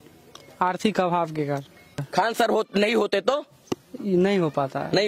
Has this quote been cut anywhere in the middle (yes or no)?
yes